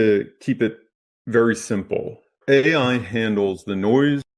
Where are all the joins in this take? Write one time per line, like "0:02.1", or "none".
0:02.3